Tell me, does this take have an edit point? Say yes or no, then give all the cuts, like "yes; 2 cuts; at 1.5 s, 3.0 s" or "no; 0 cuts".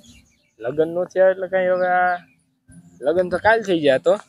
no; 0 cuts